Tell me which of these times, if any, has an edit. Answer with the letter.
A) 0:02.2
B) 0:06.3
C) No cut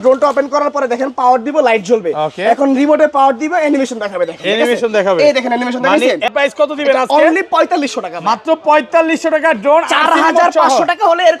B